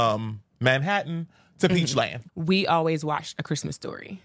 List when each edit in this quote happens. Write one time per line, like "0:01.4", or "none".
0:02.2